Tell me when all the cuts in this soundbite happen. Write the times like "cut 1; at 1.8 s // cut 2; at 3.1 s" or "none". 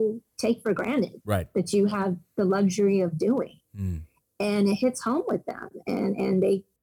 none